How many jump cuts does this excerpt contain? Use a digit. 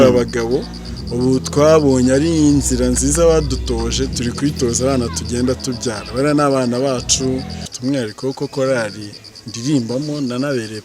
1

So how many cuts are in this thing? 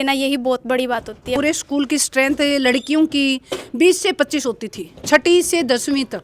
1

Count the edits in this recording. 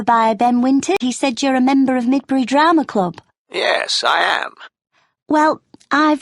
1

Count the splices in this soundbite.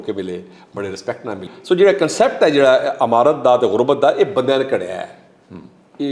1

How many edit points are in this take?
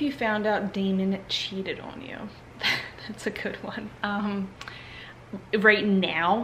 0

